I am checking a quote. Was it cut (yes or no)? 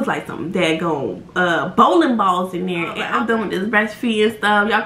yes